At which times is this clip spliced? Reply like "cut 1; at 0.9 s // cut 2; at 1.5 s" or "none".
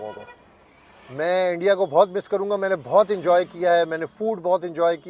none